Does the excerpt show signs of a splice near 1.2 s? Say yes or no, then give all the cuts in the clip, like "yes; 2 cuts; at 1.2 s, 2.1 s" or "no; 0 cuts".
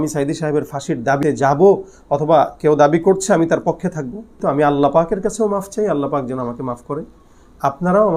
yes; 2 cuts; at 1.2 s, 4.3 s